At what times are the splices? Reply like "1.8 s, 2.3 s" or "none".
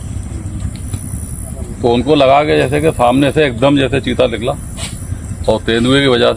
none